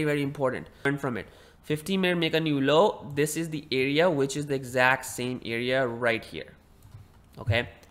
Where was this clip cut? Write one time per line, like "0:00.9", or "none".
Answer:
0:00.9